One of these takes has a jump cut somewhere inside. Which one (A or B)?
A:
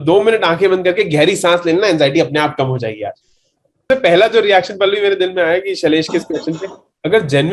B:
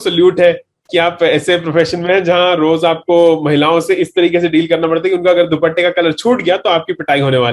A